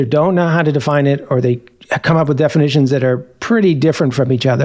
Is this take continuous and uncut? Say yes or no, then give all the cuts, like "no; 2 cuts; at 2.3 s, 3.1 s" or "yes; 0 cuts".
no; 1 cut; at 1.7 s